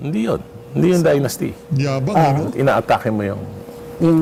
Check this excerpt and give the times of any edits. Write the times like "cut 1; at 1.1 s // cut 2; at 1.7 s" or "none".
none